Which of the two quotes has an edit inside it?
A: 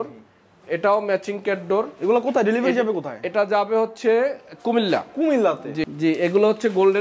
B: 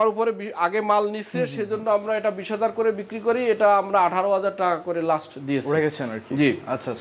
A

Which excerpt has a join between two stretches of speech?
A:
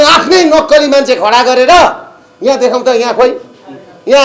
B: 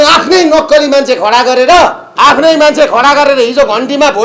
B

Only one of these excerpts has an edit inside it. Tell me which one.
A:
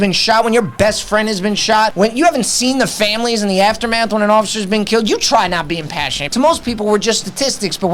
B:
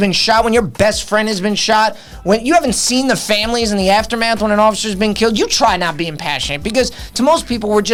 A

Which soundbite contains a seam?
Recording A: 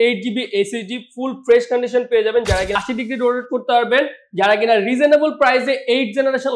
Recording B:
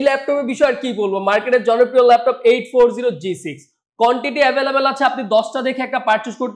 A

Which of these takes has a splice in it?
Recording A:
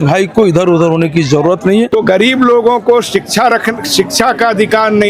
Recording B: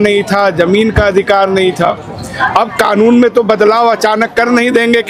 A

